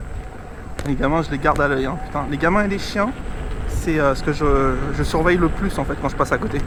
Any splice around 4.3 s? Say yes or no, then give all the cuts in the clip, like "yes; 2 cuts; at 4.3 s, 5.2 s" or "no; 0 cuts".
no; 0 cuts